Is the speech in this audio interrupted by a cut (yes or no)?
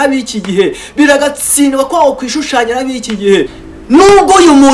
yes